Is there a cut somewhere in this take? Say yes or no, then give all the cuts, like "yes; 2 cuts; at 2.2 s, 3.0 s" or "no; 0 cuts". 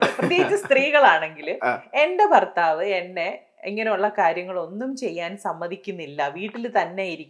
no; 0 cuts